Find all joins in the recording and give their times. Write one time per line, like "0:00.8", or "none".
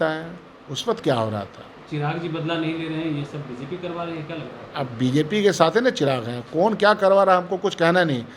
none